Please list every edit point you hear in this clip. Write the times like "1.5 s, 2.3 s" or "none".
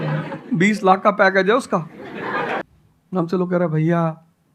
2.6 s